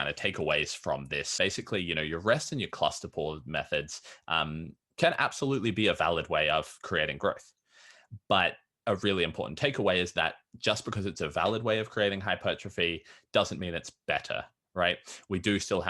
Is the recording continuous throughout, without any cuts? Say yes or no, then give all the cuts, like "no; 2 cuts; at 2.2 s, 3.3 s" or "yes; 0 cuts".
no; 1 cut; at 1.3 s